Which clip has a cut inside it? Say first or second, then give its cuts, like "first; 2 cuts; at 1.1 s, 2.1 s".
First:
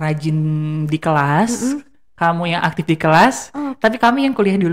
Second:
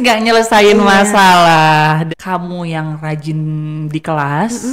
second; 1 cut; at 2.0 s